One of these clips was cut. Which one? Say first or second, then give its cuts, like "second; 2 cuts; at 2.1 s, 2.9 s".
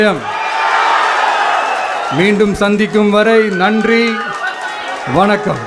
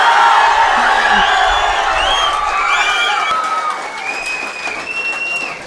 second; 1 cut; at 3.3 s